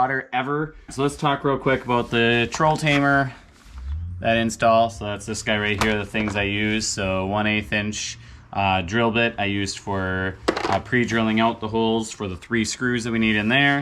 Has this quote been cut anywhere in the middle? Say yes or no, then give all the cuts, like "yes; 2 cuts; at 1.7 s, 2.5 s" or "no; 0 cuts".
yes; 1 cut; at 0.9 s